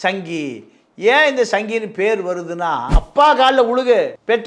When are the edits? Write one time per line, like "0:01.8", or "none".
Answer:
0:03.0